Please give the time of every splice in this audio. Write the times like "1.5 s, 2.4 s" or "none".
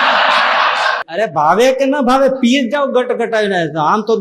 1.0 s